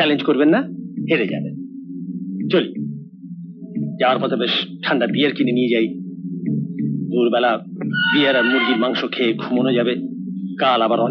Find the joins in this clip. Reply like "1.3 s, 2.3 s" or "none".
none